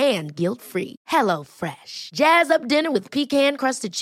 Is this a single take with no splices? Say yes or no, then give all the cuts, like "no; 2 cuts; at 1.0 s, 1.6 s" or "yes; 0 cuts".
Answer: yes; 0 cuts